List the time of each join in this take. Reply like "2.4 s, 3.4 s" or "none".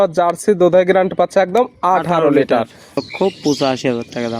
2.9 s